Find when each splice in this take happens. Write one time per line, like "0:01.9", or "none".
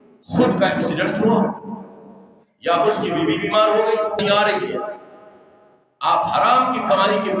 0:04.2